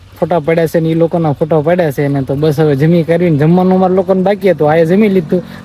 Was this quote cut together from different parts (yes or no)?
no